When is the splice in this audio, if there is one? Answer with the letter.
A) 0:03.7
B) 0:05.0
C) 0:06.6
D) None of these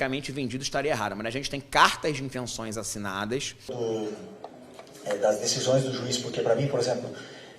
A